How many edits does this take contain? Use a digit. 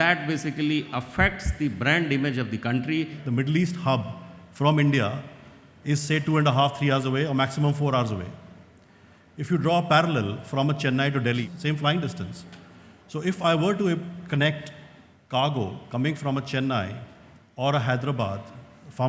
2